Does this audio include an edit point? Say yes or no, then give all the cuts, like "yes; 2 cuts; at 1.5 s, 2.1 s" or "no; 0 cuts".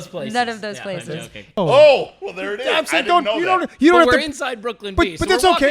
yes; 1 cut; at 1.6 s